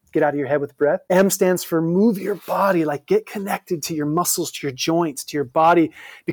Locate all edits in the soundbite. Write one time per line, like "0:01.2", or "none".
0:01.0

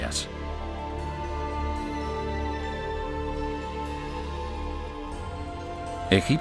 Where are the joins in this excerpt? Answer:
none

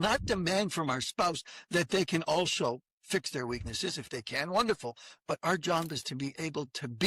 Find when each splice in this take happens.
0:02.9

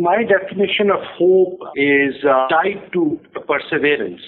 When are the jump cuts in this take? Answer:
0:02.5

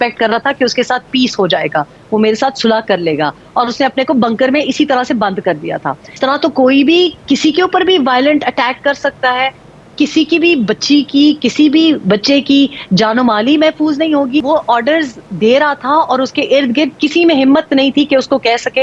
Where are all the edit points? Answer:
0:02.0
0:06.2
0:14.4

